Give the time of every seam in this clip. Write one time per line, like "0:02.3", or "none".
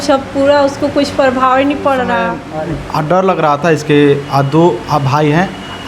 0:02.4